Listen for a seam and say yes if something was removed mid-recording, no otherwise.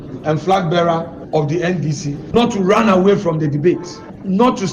yes